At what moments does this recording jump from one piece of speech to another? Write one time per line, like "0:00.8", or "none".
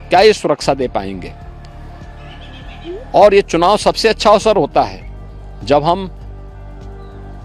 none